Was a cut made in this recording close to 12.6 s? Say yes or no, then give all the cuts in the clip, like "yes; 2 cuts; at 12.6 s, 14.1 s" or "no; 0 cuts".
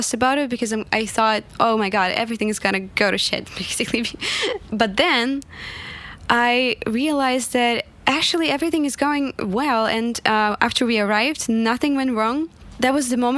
yes; 3 cuts; at 2.9 s, 4.6 s, 12.6 s